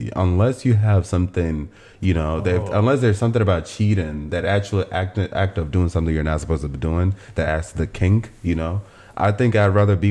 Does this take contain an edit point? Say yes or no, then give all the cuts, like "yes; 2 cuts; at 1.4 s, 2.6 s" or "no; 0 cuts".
no; 0 cuts